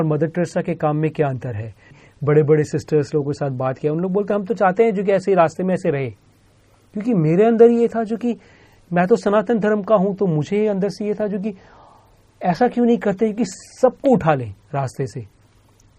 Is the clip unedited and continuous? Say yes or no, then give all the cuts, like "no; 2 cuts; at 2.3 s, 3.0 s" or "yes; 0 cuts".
no; 1 cut; at 2.0 s